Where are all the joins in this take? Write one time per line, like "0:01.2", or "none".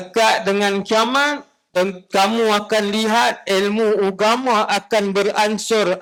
none